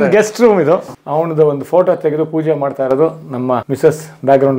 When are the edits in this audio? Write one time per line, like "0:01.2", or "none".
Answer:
0:00.9
0:03.7